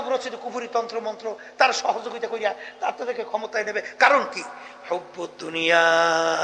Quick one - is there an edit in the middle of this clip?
no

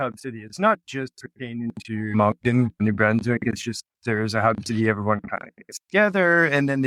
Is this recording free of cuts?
yes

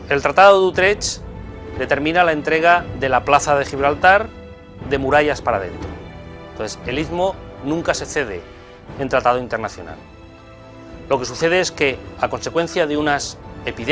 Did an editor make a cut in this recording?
yes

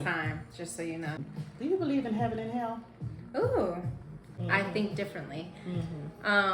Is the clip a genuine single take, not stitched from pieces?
no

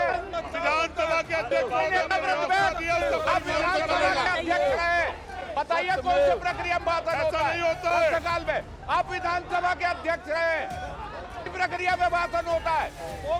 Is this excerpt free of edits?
yes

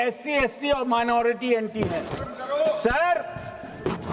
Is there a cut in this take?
no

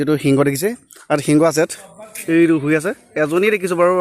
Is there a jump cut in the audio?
yes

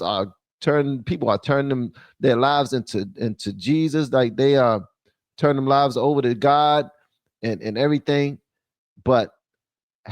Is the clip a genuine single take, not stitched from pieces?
yes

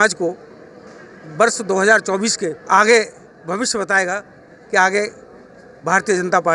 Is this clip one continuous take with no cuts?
no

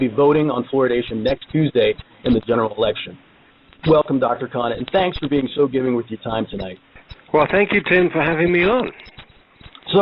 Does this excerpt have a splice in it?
yes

